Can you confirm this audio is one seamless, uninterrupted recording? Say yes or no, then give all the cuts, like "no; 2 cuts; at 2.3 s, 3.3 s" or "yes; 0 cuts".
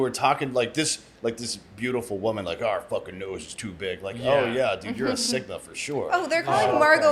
yes; 0 cuts